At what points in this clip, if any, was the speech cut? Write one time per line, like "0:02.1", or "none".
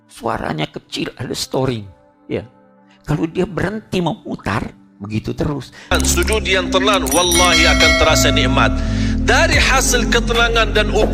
0:05.9